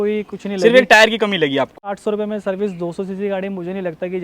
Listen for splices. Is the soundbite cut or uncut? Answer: cut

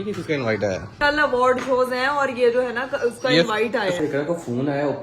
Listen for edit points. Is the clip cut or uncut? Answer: cut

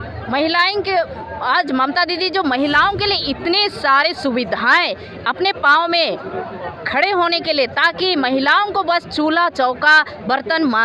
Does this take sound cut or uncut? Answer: uncut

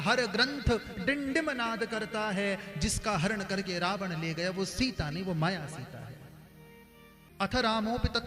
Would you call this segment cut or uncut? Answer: cut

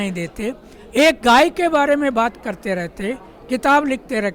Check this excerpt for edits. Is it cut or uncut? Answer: uncut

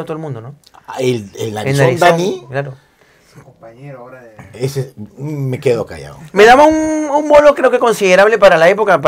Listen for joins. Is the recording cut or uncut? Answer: uncut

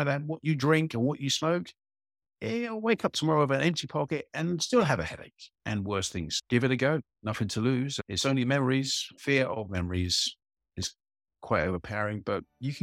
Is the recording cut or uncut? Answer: cut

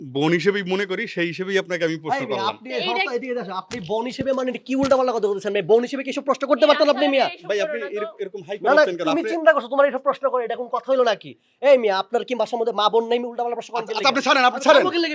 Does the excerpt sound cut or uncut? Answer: uncut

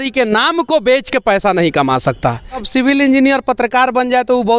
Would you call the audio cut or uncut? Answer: cut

